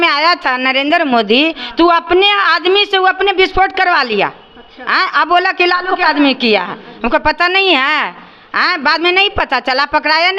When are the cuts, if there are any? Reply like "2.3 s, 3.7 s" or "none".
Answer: none